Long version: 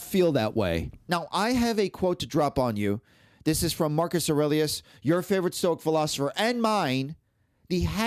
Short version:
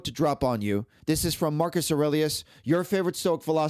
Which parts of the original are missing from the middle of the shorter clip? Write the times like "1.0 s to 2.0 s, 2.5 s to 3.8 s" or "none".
3.1 s to 3.3 s